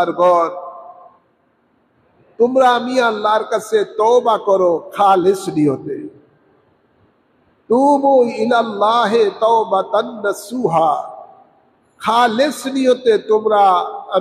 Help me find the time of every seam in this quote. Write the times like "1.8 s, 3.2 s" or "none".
none